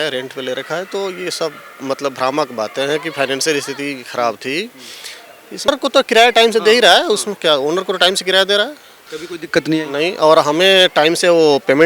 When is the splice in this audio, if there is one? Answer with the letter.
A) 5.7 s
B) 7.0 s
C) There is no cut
A